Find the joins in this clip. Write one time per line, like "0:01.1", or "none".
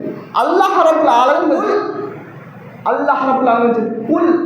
0:01.6